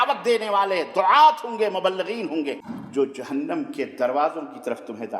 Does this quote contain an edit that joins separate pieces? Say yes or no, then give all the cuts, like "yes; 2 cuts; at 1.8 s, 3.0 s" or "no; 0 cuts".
yes; 1 cut; at 2.7 s